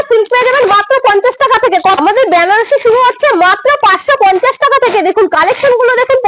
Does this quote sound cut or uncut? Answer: cut